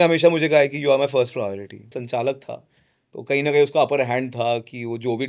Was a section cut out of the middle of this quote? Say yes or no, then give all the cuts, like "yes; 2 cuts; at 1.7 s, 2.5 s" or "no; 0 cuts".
yes; 1 cut; at 1.9 s